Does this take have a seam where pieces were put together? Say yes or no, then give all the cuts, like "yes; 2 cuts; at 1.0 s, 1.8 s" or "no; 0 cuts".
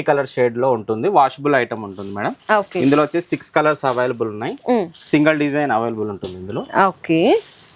no; 0 cuts